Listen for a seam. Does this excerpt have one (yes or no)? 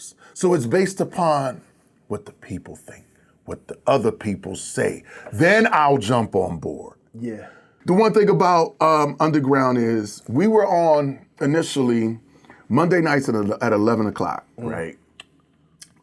yes